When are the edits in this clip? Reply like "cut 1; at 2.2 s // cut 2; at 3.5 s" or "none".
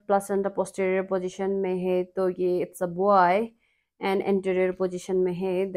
none